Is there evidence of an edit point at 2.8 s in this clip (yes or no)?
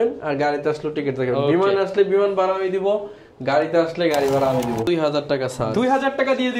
no